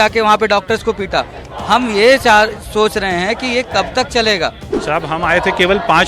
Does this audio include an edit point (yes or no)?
yes